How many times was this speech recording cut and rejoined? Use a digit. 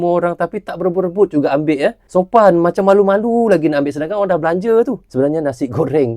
2